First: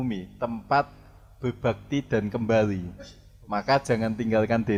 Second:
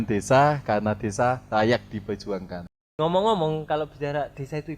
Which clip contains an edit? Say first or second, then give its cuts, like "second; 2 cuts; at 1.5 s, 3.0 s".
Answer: second; 1 cut; at 2.9 s